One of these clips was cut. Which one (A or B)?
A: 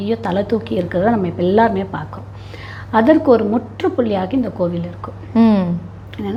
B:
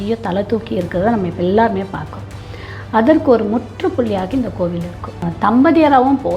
B